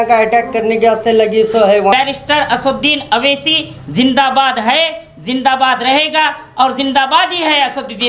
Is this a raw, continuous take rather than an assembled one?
no; 1 cut; at 1.8 s

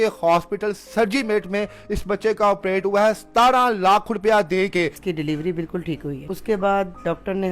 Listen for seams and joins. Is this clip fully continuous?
no; 2 cuts; at 5.0 s, 6.2 s

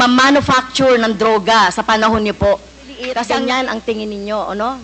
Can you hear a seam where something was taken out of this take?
yes; 1 cut; at 3.2 s

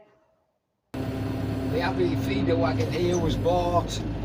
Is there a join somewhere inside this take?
yes; 1 cut; at 0.9 s

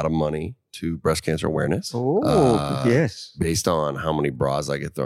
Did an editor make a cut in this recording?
yes; 2 cuts; at 1.9 s, 3.2 s

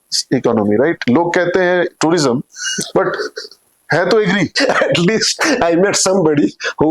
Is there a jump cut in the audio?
yes; 2 cuts; at 1.0 s, 4.5 s

